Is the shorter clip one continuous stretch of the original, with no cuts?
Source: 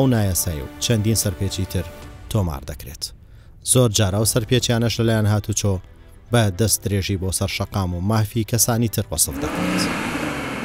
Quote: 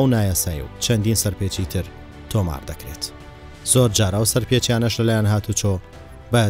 yes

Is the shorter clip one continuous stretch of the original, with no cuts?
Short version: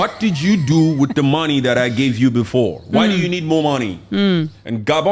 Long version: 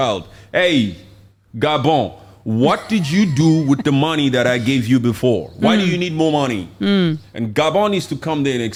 yes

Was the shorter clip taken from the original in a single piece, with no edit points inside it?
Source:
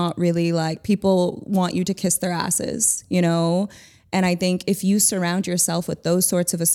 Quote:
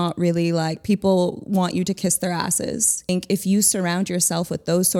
no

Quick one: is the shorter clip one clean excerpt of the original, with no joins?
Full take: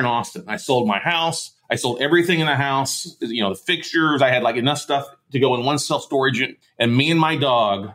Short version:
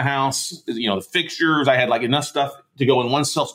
yes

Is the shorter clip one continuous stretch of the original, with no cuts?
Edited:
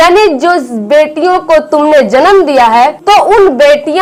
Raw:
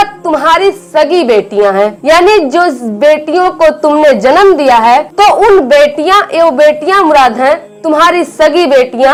yes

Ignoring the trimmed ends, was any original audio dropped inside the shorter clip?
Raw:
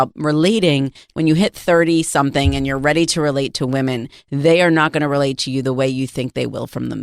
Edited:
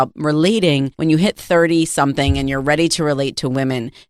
yes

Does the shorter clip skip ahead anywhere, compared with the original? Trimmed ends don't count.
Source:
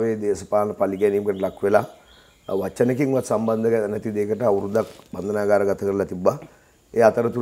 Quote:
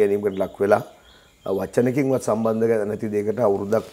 no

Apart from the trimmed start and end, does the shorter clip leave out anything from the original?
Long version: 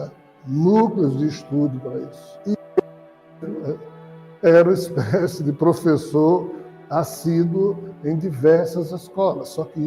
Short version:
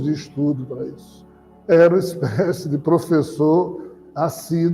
yes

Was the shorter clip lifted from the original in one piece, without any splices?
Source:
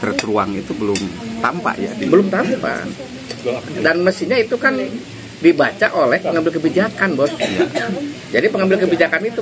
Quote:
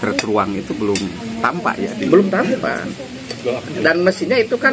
yes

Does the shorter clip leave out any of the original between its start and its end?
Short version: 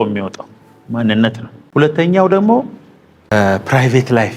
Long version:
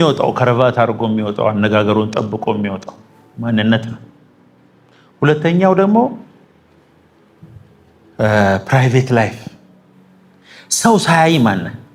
yes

